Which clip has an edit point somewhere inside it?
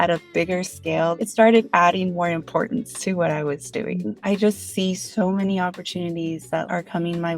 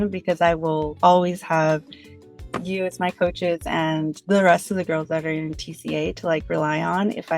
first; 3 cuts; at 1.2 s, 4.2 s, 6.7 s

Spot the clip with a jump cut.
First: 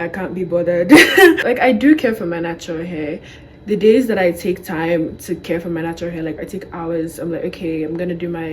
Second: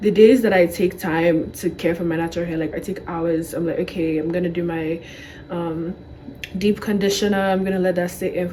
first; 1 cut; at 1.4 s

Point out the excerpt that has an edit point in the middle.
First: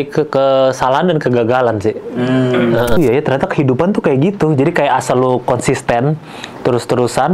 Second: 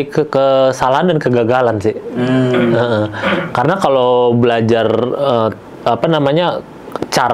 first; 1 cut; at 3.0 s

